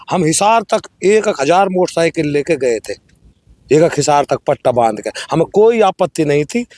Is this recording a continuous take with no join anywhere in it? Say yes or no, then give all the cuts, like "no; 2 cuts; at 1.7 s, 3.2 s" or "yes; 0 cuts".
yes; 0 cuts